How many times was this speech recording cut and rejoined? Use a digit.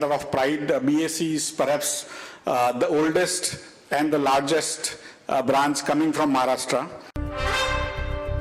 1